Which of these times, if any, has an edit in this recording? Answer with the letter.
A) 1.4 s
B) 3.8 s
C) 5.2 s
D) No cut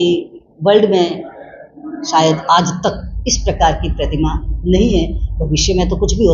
D